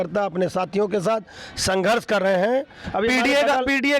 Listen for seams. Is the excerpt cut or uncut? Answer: cut